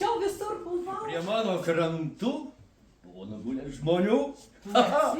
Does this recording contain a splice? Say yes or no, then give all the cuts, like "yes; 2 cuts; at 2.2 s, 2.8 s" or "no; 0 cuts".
yes; 1 cut; at 1.1 s